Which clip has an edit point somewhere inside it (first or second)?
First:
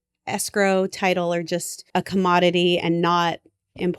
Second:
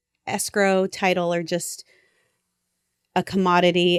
first